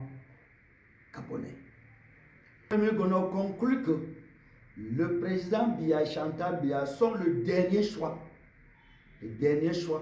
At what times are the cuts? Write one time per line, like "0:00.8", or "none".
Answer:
0:02.7